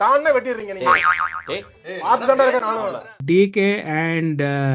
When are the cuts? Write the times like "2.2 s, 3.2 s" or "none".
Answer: 3.1 s